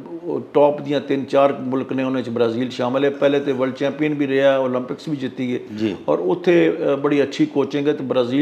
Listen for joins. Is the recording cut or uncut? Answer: uncut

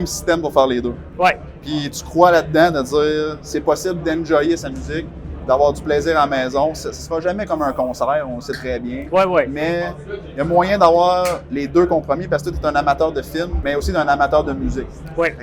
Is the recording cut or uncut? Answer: cut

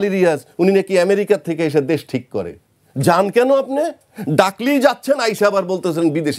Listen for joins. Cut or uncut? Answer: uncut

